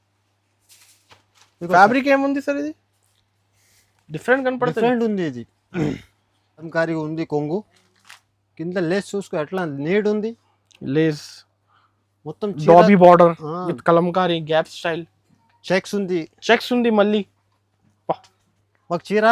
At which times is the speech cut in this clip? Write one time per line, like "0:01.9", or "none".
0:06.7